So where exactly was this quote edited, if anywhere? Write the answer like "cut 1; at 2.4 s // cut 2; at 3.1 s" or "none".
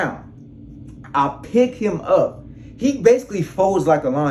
none